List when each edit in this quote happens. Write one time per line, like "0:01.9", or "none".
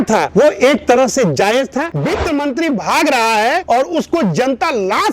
0:02.0

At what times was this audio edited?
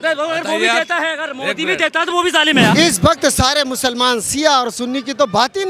0:02.7

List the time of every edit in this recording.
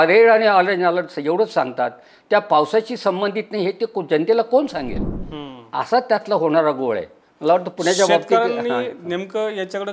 none

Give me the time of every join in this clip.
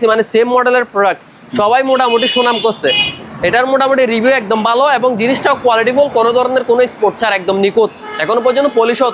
none

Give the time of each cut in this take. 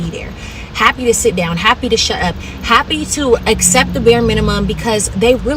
0:01.4

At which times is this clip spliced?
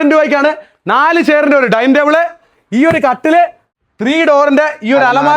0:03.6

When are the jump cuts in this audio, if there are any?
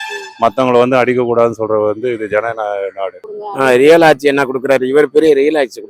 0:03.2

